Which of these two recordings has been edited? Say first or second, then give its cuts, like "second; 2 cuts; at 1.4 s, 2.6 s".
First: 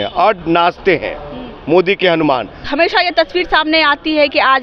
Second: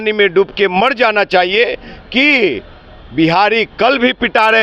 first; 1 cut; at 2.6 s